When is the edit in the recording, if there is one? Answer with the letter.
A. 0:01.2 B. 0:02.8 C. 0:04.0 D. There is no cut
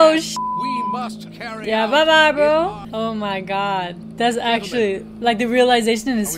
B